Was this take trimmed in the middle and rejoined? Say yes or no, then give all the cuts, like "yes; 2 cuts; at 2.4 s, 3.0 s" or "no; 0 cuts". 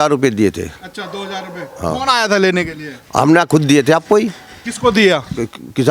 no; 0 cuts